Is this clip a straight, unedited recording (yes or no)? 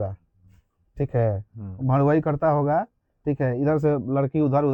yes